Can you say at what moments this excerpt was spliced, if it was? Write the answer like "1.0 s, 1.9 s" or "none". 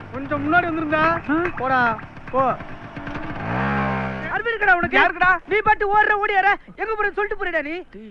4.4 s